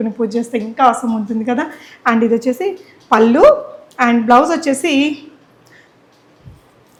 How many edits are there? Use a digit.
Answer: 0